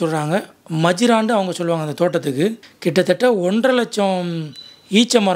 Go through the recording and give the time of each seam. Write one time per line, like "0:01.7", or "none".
0:02.7

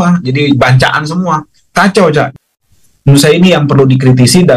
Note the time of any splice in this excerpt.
0:02.4

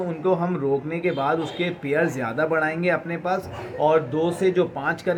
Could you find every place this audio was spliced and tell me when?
none

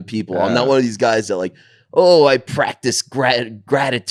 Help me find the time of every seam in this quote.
none

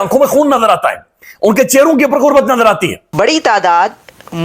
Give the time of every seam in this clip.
0:03.0

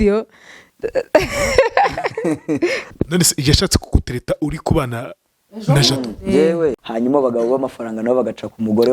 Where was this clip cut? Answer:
0:02.8
0:06.8

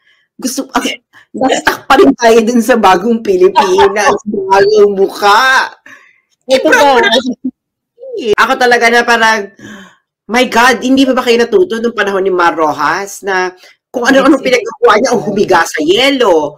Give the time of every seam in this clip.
0:08.3

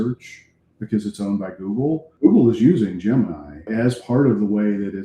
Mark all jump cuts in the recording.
0:02.1
0:03.7

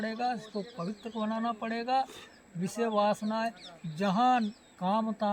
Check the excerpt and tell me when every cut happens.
none

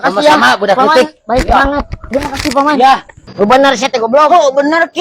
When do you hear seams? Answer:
0:03.2

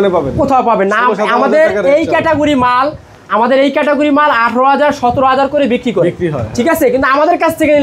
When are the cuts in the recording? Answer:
none

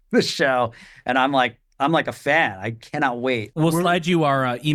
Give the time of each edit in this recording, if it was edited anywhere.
none

